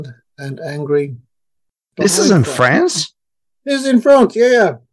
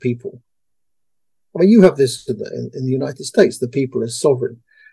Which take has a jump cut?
first; 1 cut; at 1.9 s

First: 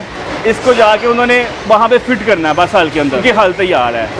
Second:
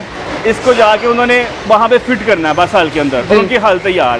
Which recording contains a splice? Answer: first; 1 cut; at 3.2 s

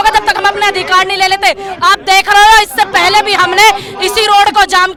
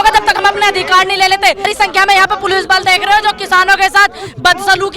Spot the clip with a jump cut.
second; 1 cut; at 1.7 s

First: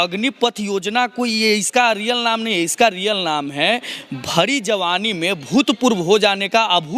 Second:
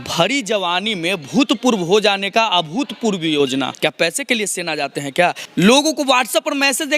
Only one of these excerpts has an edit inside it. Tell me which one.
second; 2 cuts; at 3.7 s, 5.4 s

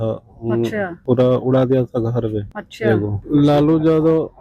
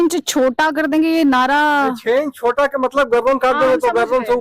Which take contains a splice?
first; 2 cuts; at 0.9 s, 3.1 s

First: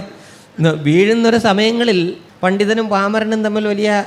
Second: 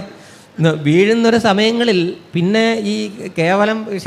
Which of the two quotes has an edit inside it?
first; 1 cut; at 2.2 s

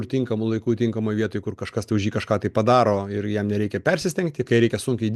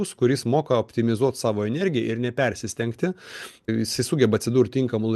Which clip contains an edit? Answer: second; 1 cut; at 3.7 s

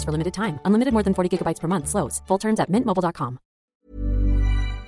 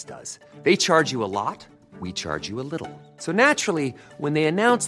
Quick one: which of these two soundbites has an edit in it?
first; 1 cut; at 3.7 s

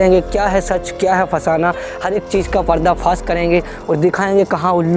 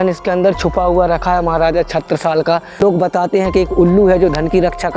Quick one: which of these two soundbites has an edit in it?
second; 1 cut; at 2.8 s

